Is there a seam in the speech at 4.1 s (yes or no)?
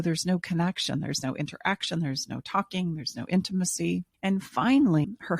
yes